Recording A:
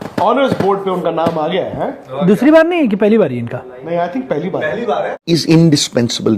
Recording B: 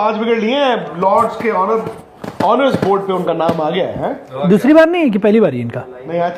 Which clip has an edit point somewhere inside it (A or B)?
A